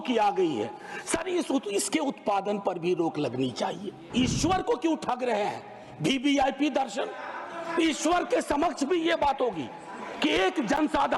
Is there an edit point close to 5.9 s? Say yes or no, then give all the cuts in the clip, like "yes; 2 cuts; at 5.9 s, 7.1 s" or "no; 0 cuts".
no; 1 cut; at 4.0 s